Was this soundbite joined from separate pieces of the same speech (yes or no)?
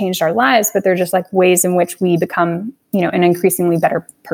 no